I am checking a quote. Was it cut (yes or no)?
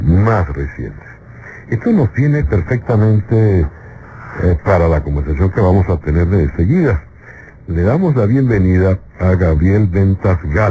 no